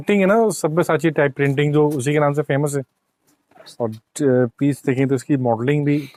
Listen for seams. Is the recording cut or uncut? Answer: uncut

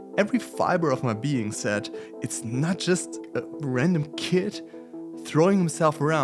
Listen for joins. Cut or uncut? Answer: cut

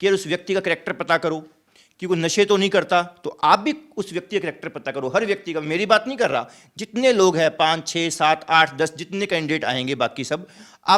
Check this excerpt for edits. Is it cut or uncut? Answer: uncut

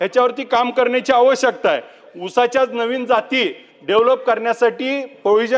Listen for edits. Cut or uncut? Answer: uncut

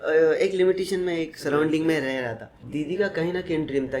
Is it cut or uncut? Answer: cut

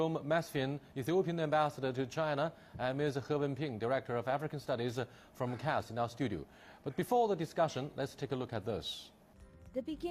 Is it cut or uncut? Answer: cut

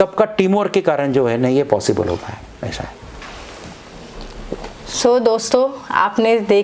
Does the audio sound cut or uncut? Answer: uncut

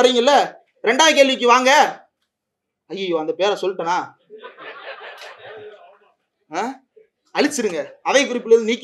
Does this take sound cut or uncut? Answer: uncut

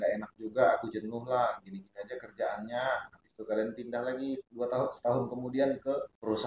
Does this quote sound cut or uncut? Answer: cut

